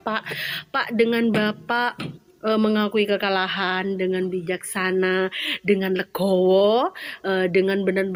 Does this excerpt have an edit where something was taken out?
no; 0 cuts

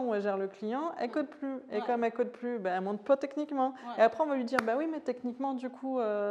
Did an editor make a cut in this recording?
no; 0 cuts

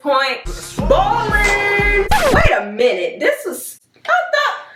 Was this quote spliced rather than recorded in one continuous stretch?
no; 0 cuts

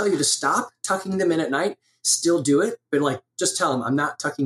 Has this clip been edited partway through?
no; 0 cuts

